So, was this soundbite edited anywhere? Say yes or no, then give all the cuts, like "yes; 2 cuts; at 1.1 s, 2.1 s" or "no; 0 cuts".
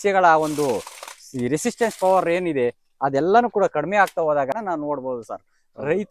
yes; 1 cut; at 4.5 s